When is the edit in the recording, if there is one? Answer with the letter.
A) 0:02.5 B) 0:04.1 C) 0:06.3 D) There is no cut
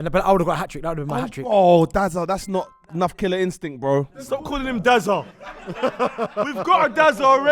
B